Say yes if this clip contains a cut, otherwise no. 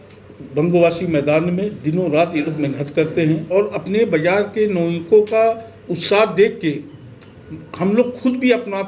yes